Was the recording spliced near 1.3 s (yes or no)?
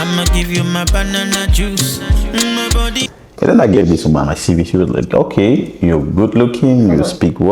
no